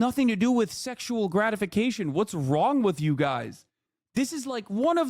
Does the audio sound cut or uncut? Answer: cut